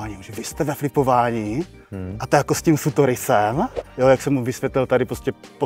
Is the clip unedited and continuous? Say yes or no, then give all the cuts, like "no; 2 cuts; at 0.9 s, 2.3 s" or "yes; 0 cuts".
no; 1 cut; at 3.8 s